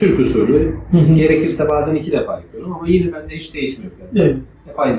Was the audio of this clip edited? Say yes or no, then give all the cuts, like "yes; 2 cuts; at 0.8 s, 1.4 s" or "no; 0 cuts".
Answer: no; 0 cuts